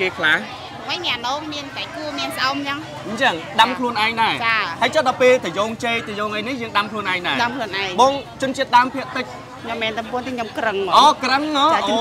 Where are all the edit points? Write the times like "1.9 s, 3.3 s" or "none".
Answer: 9.5 s

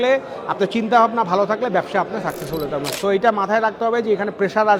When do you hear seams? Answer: 2.9 s

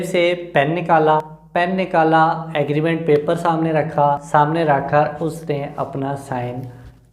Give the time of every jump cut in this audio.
1.4 s, 4.2 s

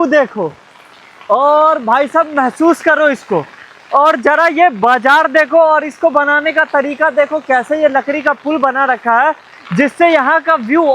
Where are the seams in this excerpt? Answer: none

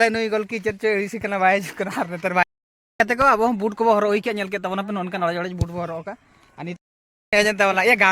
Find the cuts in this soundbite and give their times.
2.4 s, 6.8 s

